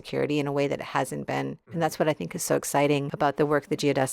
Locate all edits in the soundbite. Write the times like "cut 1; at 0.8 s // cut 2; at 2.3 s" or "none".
cut 1; at 1.7 s // cut 2; at 3.1 s